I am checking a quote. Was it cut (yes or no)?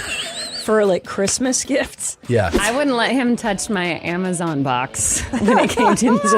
yes